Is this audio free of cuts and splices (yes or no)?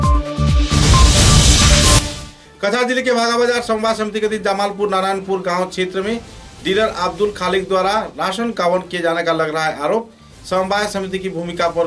no